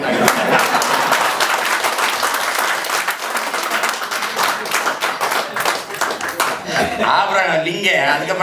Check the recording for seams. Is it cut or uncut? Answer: uncut